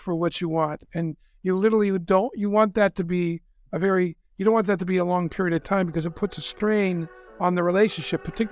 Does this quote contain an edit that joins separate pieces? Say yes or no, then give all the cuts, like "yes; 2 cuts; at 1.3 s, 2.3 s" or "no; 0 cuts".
no; 0 cuts